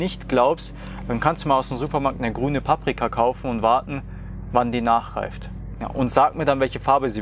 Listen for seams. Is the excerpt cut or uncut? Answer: uncut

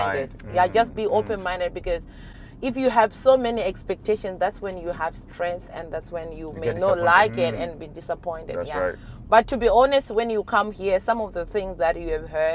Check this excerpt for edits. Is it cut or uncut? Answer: uncut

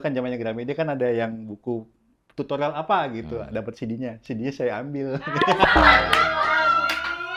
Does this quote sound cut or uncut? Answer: uncut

